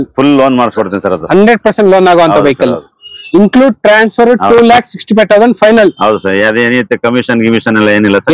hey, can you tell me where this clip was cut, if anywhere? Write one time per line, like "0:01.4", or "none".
0:03.2